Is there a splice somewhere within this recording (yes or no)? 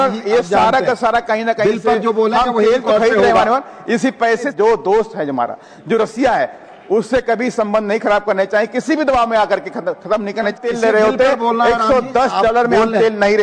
yes